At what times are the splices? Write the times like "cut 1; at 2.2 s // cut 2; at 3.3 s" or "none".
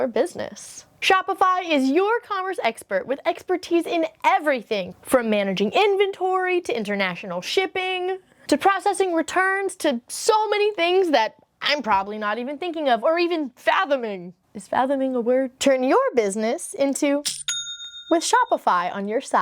none

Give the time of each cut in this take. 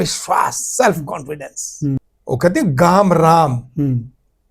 cut 1; at 2.1 s

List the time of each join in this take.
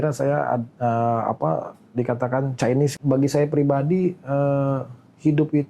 cut 1; at 2.9 s

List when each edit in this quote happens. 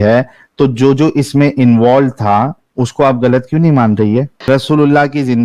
cut 1; at 4.4 s

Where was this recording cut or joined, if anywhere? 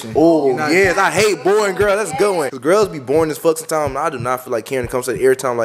cut 1; at 2.5 s

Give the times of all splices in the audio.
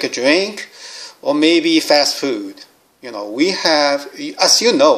none

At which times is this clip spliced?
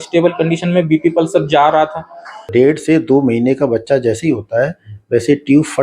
cut 1; at 2.5 s

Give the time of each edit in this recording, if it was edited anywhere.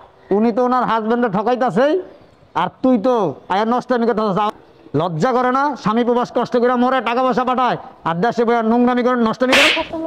cut 1; at 4.5 s

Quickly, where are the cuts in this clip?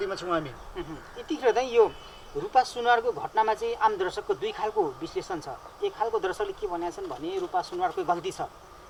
none

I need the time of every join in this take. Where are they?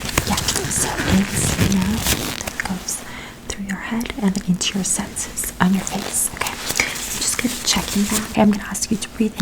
cut 1; at 8.3 s

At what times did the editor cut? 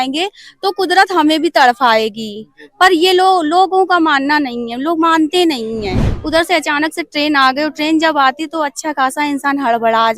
cut 1; at 6.1 s

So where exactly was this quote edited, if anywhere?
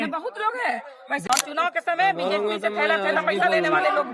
cut 1; at 1.2 s

